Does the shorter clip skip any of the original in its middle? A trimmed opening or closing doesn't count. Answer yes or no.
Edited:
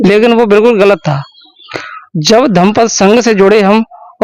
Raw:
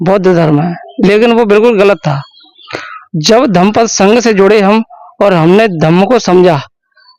no